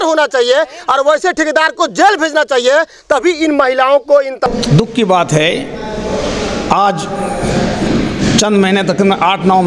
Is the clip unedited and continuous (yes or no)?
no